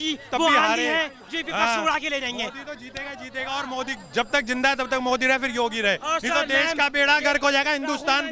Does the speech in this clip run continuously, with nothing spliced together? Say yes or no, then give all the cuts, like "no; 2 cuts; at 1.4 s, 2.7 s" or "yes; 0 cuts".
yes; 0 cuts